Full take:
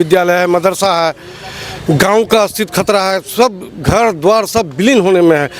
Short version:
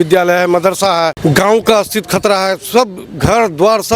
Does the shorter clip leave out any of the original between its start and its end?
yes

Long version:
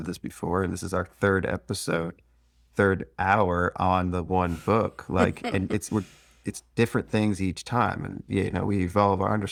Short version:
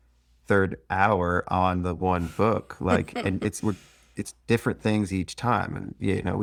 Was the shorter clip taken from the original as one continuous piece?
yes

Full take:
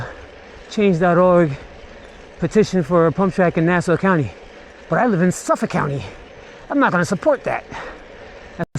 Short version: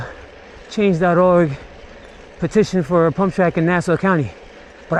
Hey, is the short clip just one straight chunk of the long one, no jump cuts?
yes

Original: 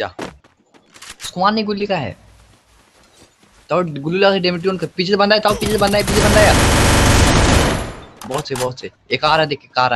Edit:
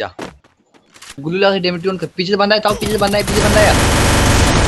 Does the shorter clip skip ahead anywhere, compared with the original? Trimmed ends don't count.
yes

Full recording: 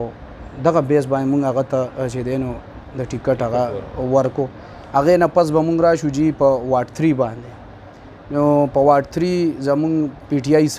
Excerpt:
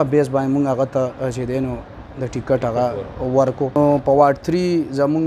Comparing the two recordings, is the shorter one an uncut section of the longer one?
no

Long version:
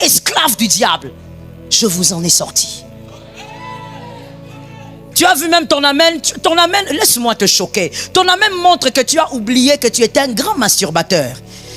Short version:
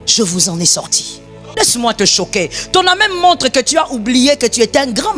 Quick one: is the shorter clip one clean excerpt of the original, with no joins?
no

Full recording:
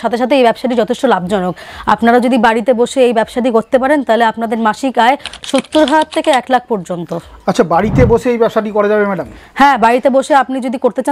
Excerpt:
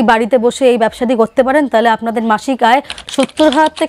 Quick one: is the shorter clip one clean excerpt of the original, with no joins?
yes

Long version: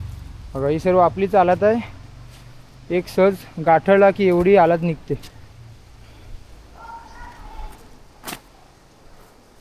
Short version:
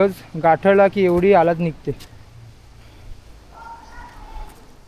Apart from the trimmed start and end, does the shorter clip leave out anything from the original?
no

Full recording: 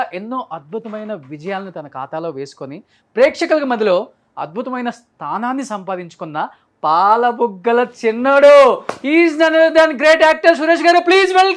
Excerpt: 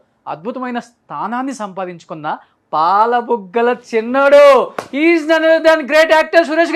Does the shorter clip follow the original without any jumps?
yes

